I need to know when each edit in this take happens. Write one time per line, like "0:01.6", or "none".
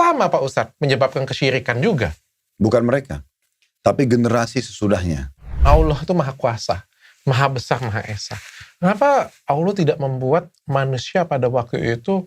0:05.6